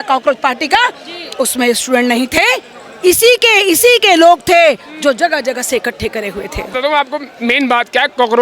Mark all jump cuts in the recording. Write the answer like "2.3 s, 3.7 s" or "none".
6.7 s